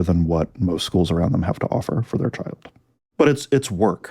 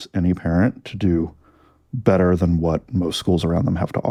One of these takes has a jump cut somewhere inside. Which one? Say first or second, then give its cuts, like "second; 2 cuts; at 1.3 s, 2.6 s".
first; 1 cut; at 3.0 s